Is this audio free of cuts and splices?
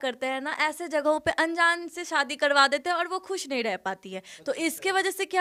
yes; 0 cuts

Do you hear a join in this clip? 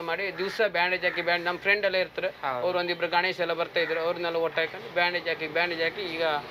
no; 0 cuts

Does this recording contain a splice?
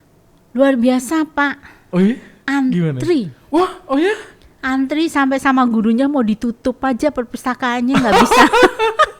no; 0 cuts

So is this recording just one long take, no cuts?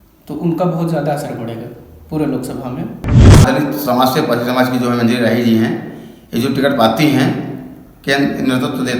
no; 1 cut; at 3.4 s

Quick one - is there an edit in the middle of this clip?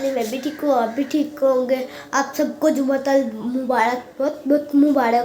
no; 0 cuts

